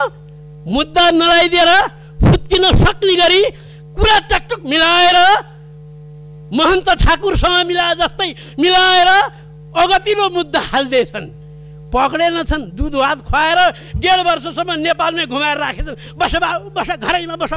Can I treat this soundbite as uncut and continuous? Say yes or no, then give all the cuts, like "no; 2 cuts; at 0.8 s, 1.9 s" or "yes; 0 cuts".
yes; 0 cuts